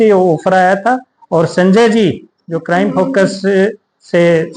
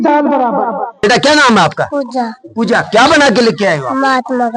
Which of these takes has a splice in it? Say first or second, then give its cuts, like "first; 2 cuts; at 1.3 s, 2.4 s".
second; 1 cut; at 1.0 s